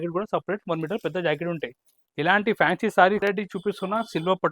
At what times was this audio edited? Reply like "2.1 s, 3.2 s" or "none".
3.2 s